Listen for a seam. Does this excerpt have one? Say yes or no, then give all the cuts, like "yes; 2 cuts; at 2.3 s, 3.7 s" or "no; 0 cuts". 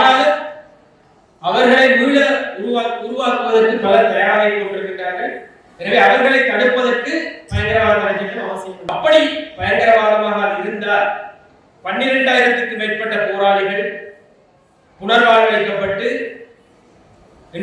yes; 1 cut; at 8.8 s